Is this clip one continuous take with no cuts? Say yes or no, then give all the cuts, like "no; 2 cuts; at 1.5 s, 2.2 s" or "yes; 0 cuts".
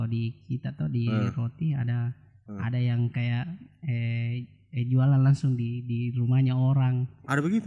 yes; 0 cuts